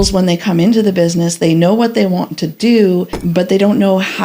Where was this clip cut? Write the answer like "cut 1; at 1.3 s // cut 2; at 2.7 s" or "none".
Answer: cut 1; at 3.2 s